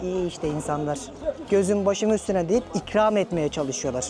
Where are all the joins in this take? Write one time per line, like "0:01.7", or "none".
none